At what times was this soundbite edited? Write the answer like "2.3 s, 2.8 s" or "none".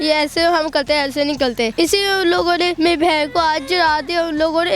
1.7 s, 2.7 s